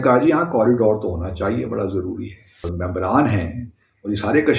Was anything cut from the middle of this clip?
yes; 1 cut; at 2.7 s

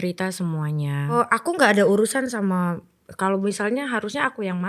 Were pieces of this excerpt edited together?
yes; 1 cut; at 1.1 s

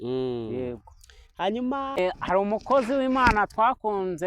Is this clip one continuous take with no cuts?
yes; 0 cuts

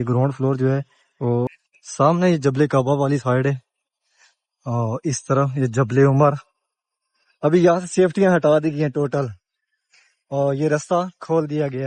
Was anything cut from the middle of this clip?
yes; 1 cut; at 1.5 s

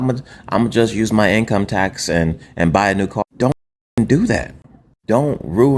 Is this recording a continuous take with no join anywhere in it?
yes; 0 cuts

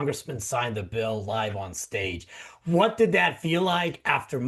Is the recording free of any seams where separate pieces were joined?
yes; 0 cuts

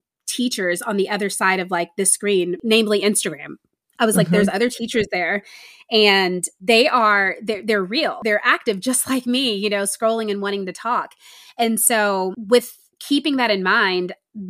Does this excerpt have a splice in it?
yes; 4 cuts; at 2.6 s, 6.5 s, 8.2 s, 12.4 s

